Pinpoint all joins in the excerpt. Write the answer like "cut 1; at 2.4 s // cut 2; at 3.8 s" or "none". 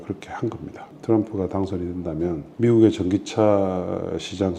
cut 1; at 0.9 s // cut 2; at 2.5 s